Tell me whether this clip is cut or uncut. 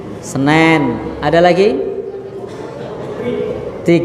uncut